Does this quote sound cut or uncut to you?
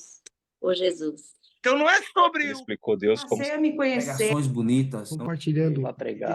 cut